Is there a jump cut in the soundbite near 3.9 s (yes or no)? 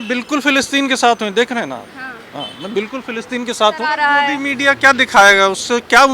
yes